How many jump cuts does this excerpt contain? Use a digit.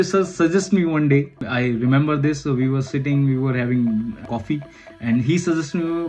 2